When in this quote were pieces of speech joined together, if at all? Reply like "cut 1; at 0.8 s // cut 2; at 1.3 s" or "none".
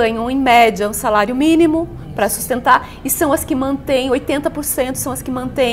none